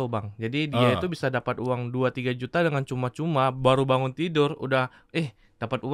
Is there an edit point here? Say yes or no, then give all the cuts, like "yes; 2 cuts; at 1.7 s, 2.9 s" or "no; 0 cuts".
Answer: no; 0 cuts